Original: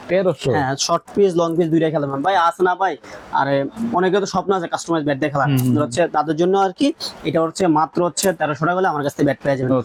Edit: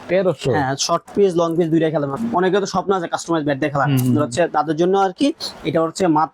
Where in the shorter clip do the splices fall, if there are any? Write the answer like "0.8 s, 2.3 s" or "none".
2.1 s